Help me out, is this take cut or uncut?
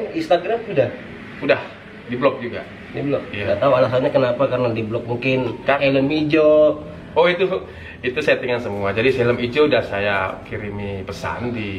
cut